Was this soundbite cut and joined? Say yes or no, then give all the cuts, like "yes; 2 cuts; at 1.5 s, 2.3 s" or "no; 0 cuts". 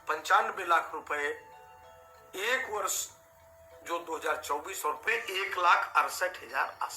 yes; 1 cut; at 5.0 s